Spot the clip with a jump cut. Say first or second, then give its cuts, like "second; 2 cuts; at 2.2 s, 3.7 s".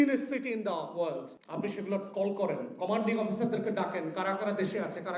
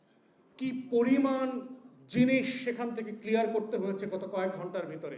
first; 1 cut; at 1.4 s